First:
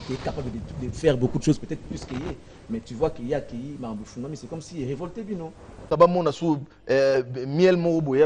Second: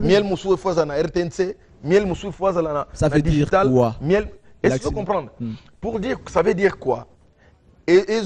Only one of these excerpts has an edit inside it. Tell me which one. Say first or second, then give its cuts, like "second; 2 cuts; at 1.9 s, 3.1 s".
first; 1 cut; at 5.9 s